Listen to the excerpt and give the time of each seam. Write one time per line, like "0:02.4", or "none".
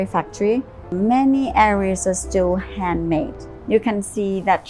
0:00.9
0:03.5